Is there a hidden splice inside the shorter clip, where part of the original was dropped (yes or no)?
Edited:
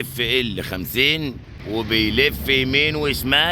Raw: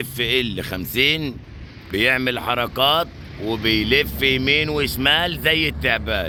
yes